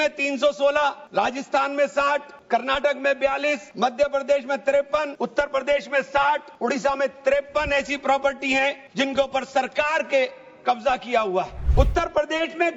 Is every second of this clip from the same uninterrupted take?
no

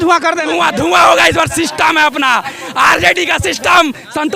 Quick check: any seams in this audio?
no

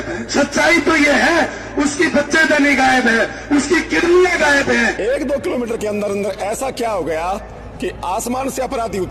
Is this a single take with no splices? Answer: yes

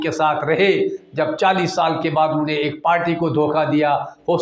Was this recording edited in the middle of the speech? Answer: no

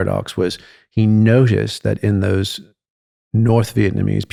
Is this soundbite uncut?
yes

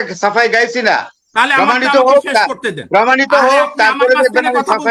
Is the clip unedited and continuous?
yes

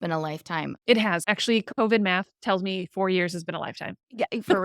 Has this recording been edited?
yes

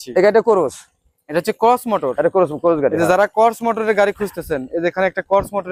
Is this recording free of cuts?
yes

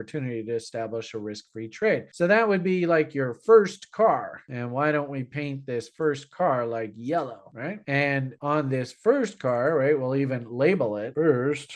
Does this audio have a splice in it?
no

